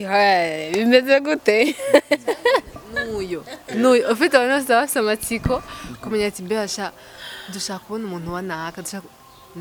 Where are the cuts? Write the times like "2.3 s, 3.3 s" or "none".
none